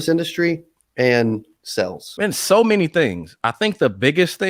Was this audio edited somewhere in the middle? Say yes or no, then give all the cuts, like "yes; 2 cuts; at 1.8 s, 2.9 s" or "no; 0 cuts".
yes; 2 cuts; at 2.0 s, 3.4 s